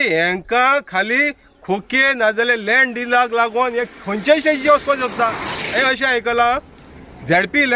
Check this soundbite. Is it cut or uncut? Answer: cut